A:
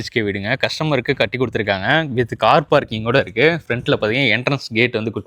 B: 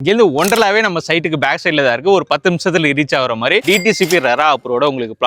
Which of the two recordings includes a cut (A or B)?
B